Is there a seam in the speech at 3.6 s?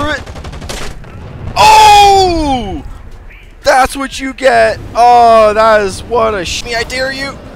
no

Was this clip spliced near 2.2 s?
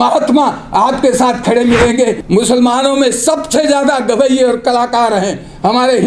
yes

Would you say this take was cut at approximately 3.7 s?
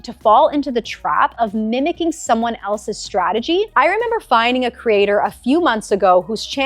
yes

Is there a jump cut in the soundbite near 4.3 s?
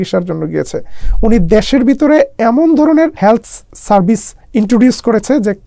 yes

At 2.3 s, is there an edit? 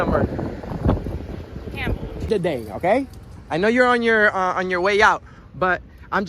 yes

